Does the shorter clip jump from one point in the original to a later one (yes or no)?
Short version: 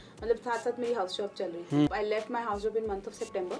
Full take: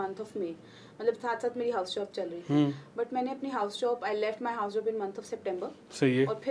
yes